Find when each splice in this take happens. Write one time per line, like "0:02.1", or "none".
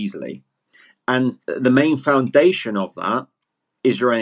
0:01.4